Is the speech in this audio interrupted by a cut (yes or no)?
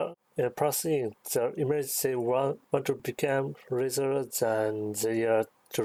no